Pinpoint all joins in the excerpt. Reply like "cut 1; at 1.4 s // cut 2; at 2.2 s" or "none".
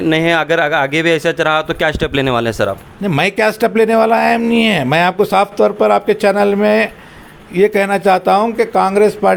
none